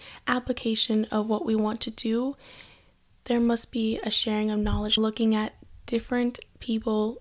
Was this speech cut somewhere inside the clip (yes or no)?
yes